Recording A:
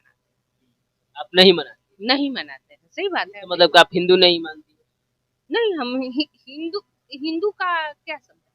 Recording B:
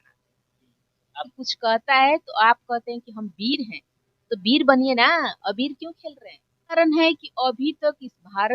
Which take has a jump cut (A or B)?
B